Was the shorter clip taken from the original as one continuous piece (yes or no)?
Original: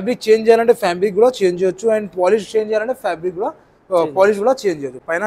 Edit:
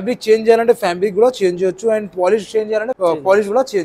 no